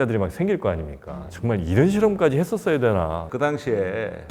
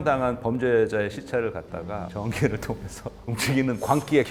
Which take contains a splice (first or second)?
first